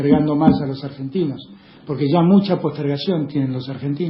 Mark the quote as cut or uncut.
uncut